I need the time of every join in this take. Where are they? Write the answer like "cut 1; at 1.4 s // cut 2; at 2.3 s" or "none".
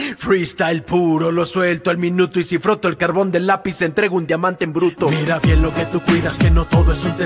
none